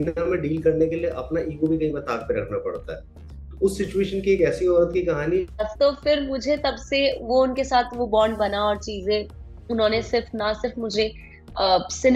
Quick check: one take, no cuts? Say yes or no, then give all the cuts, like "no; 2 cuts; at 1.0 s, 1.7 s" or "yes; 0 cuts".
no; 1 cut; at 5.5 s